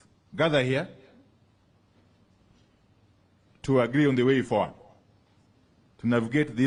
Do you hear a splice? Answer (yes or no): no